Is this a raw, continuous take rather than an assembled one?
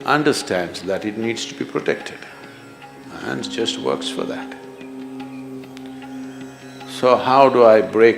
yes; 0 cuts

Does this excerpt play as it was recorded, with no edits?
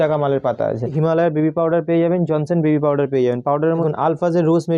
no; 2 cuts; at 0.9 s, 3.8 s

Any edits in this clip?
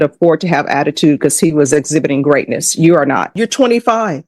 yes; 1 cut; at 3.3 s

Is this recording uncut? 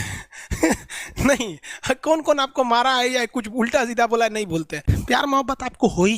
no; 1 cut; at 4.9 s

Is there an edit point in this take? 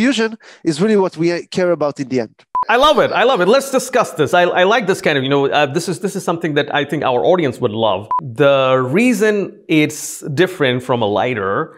yes; 2 cuts; at 2.5 s, 8.2 s

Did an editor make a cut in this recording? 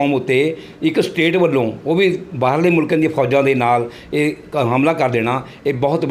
no; 0 cuts

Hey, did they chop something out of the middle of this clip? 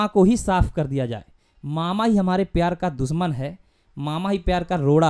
no; 0 cuts

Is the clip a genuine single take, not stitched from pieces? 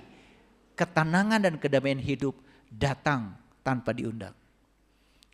yes; 0 cuts

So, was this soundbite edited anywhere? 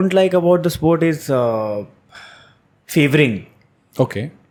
no; 0 cuts

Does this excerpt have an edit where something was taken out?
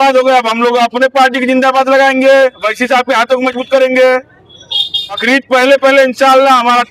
yes; 1 cut; at 5.2 s

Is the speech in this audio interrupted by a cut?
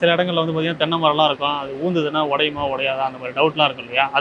no; 0 cuts

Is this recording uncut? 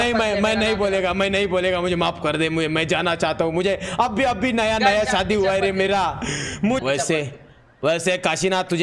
no; 1 cut; at 6.8 s

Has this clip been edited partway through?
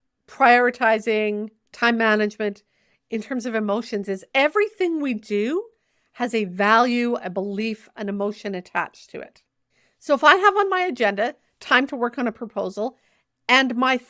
yes; 1 cut; at 4.2 s

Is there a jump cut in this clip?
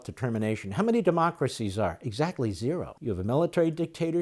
yes; 1 cut; at 2.9 s

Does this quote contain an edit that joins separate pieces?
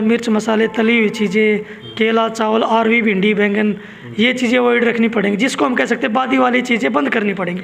no; 0 cuts

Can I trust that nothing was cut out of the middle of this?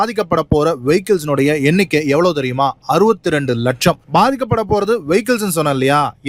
no; 1 cut; at 4.0 s

